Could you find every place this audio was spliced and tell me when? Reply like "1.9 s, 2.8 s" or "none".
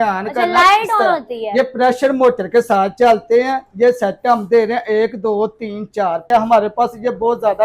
6.2 s